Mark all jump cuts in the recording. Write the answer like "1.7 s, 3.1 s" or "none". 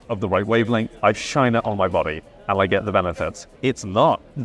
0.9 s, 3.5 s